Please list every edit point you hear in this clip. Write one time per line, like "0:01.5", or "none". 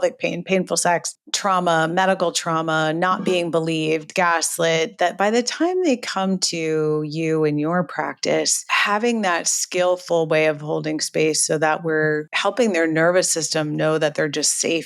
0:08.7
0:12.3